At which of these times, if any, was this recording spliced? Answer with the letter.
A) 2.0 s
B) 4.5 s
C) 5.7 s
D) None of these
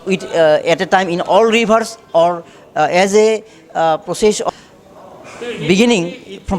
B